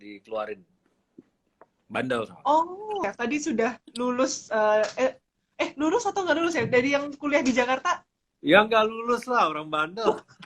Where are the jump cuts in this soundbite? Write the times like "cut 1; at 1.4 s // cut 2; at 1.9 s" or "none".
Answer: cut 1; at 3.0 s